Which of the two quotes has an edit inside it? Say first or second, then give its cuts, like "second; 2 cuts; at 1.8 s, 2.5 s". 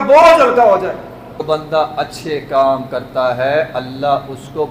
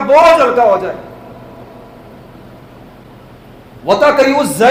first; 1 cut; at 1.4 s